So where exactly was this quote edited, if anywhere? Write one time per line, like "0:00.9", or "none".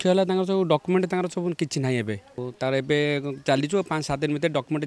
0:02.4